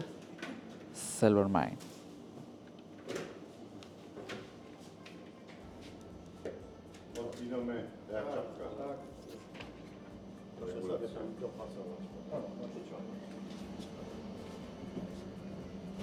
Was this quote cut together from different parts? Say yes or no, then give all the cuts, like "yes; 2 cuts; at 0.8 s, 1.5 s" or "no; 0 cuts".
no; 0 cuts